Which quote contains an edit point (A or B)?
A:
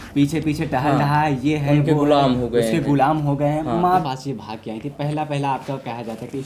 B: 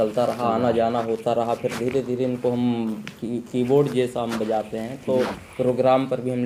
A